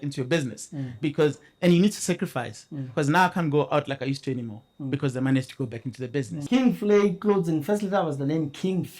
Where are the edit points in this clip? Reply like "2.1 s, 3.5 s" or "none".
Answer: 6.4 s